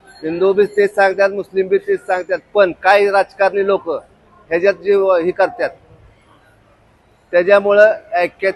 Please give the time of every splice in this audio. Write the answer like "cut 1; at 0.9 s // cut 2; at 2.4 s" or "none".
none